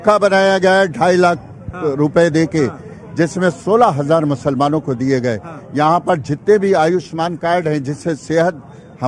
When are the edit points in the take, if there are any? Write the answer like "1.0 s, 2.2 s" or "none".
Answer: none